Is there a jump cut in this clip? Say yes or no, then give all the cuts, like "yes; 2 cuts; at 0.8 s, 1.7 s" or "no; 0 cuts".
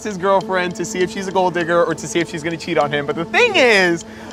no; 0 cuts